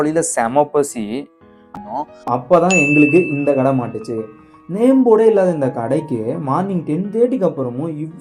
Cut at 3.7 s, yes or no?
no